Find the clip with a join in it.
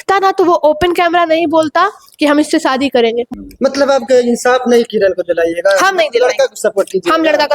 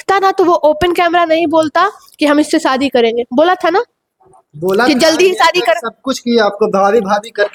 first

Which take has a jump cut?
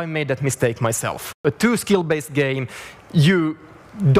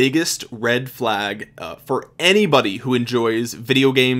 first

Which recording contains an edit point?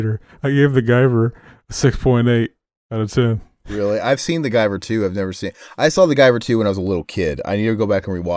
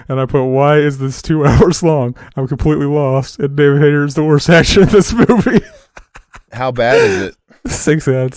first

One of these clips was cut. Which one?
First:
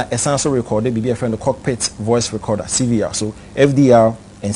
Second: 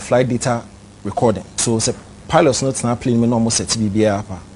second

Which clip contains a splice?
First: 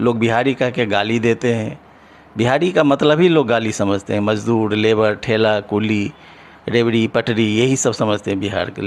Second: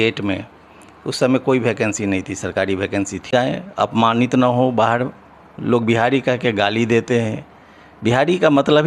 second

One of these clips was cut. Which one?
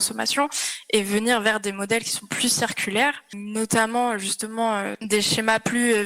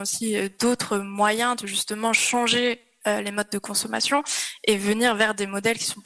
first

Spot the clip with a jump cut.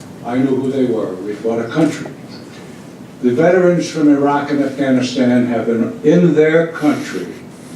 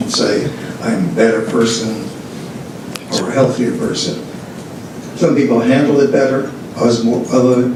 first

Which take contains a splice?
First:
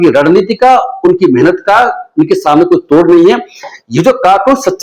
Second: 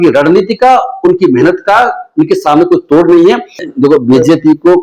second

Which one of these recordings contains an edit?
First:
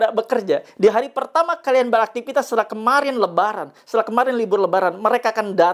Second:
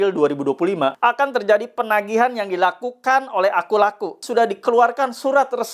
second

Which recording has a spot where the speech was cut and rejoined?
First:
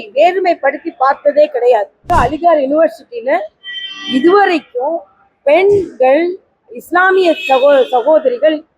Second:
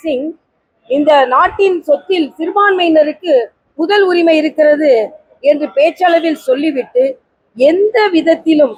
first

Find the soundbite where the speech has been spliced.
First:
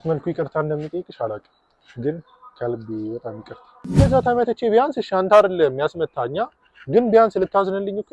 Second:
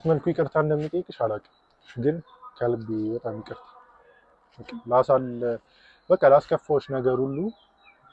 first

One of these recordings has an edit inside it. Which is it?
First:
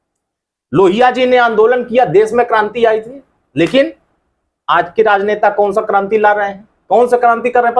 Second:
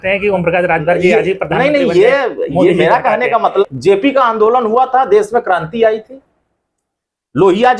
second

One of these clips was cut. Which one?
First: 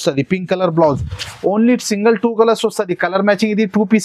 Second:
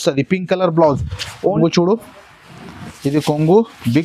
second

